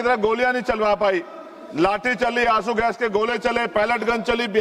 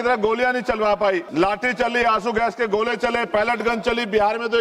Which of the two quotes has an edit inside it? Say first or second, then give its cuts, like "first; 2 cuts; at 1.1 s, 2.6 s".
second; 1 cut; at 1.3 s